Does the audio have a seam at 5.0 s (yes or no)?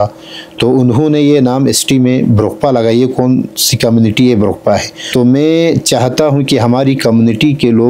yes